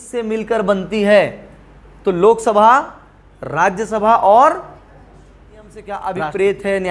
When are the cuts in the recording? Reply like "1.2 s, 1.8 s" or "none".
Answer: 5.9 s